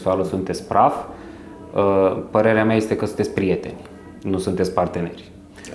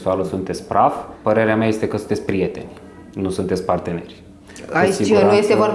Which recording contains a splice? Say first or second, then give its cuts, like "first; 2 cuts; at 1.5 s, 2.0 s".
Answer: second; 1 cut; at 1.1 s